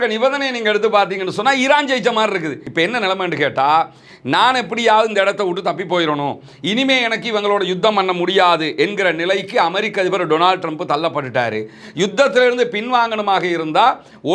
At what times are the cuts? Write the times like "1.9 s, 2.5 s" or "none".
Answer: 2.6 s